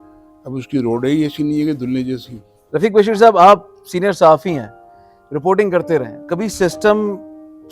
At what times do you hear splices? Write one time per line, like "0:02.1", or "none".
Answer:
0:02.5
0:06.2

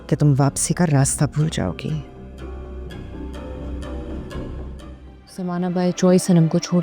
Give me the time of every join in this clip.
0:05.5

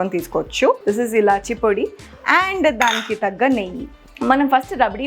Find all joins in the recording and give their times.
0:00.8
0:04.1

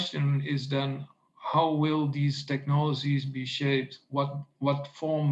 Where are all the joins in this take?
none

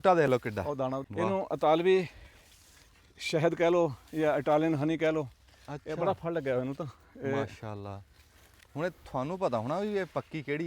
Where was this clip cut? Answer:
0:01.0

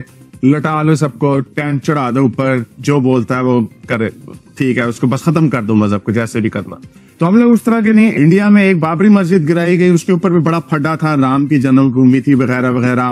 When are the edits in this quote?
0:08.1

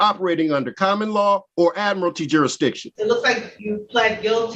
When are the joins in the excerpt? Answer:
0:01.5
0:02.9
0:03.5

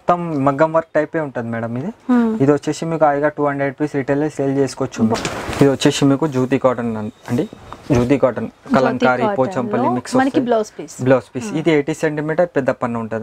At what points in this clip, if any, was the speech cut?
0:05.1

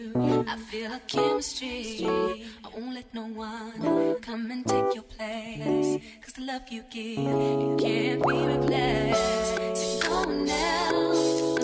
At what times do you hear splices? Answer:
0:01.9

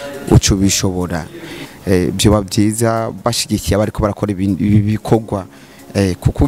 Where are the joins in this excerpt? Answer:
0:01.5

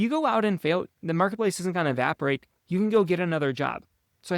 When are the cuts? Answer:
0:00.9

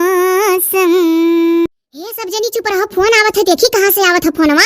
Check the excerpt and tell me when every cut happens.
0:01.7

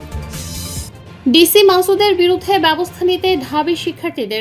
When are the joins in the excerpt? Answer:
0:01.1

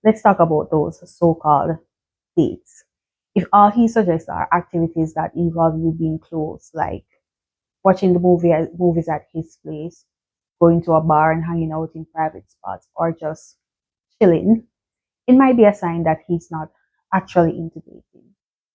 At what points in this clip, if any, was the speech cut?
none

